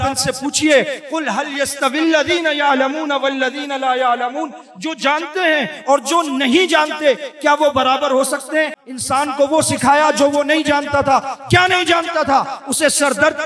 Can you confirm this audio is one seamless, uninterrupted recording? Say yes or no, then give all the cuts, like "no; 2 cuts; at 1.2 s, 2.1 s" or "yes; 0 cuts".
no; 1 cut; at 8.9 s